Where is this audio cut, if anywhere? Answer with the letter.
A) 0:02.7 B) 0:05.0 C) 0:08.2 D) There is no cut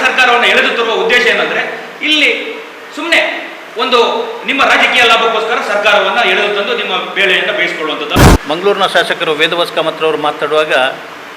C